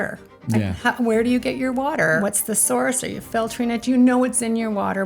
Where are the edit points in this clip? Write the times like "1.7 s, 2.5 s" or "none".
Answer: 2.2 s